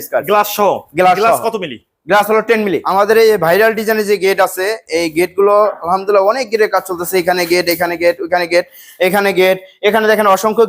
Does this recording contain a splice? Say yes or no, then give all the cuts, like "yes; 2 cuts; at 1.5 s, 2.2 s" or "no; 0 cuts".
yes; 1 cut; at 2.8 s